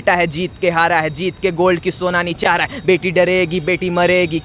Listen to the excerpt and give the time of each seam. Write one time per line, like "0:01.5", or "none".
none